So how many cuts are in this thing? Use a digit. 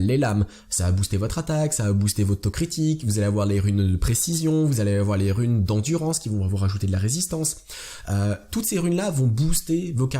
1